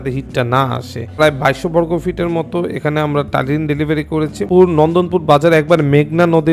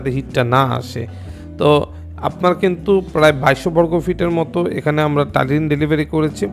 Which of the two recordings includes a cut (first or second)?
first